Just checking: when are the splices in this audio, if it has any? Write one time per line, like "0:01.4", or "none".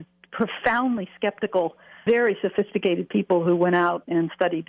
0:01.9